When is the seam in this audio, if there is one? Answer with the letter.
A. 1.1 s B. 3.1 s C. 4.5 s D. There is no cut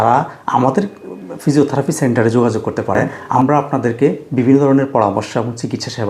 B